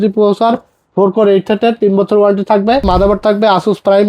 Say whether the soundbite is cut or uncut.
cut